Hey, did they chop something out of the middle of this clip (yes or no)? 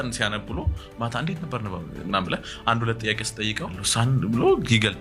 yes